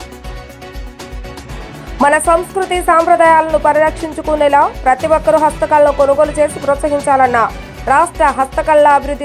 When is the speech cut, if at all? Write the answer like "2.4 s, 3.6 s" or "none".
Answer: 1.4 s